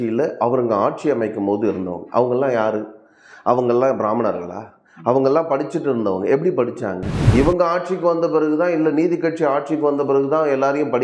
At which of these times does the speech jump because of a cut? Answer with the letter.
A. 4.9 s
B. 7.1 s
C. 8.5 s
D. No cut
B